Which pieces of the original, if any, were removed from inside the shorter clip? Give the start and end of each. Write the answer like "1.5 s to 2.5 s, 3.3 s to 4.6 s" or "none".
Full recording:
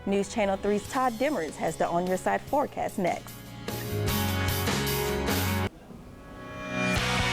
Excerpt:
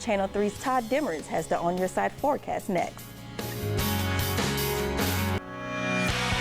5.8 s to 6.4 s